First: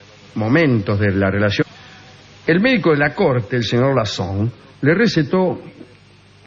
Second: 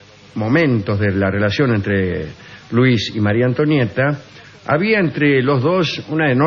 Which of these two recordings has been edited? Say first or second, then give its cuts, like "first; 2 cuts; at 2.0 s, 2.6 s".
second; 1 cut; at 1.6 s